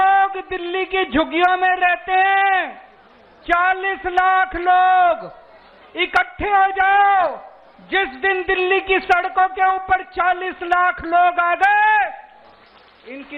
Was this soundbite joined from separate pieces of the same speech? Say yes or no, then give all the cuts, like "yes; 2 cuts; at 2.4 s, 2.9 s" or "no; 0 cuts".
no; 0 cuts